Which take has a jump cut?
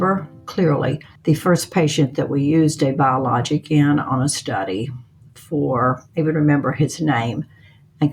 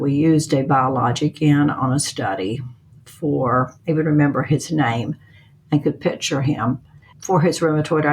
second; 1 cut; at 7.1 s

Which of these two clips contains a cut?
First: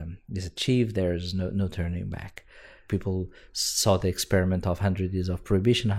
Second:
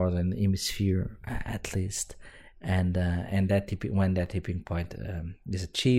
first; 1 cut; at 2.8 s

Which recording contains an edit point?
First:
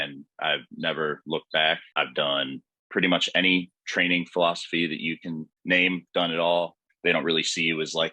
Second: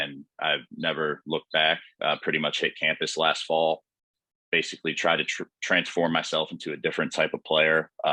first; 3 cuts; at 1.9 s, 5.5 s, 6.8 s

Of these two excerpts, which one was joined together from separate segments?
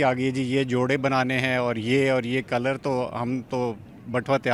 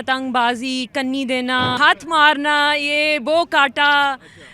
second; 1 cut; at 1.8 s

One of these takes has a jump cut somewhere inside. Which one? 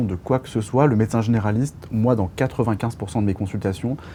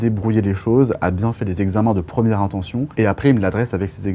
second; 1 cut; at 2.9 s

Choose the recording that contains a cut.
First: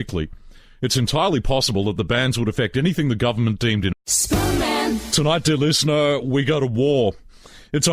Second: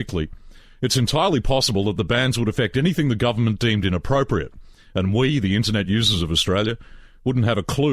second; 1 cut; at 4.0 s

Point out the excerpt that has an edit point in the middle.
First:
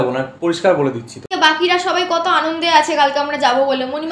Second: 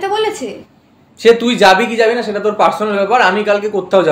first; 1 cut; at 1.3 s

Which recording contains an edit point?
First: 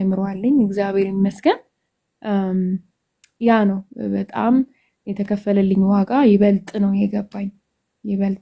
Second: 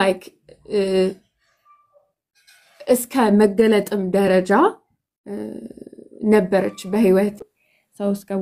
second; 1 cut; at 7.4 s

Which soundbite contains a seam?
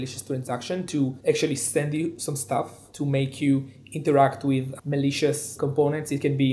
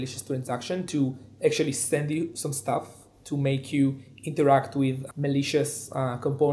first; 3 cuts; at 1.2 s, 2.8 s, 5.5 s

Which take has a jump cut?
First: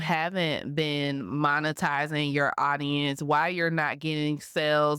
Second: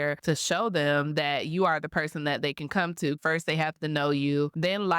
second; 1 cut; at 3.2 s

